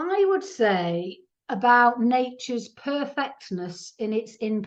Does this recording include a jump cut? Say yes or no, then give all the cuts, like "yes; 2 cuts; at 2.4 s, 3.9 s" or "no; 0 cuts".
no; 0 cuts